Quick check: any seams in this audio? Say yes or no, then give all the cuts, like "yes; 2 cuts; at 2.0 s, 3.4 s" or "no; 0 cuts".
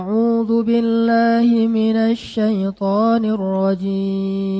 no; 0 cuts